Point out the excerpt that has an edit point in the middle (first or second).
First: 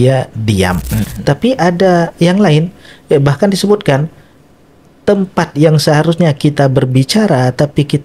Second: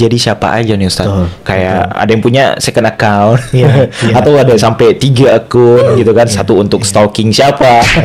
first